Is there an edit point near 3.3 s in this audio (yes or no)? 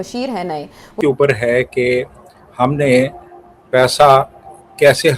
no